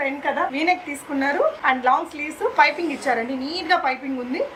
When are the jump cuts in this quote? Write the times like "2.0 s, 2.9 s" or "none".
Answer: none